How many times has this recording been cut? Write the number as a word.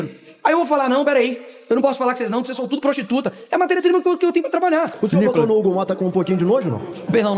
one